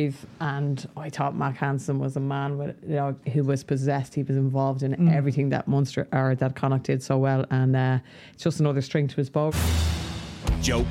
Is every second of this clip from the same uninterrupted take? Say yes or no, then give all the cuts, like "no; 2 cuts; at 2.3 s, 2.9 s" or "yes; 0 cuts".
no; 1 cut; at 9.5 s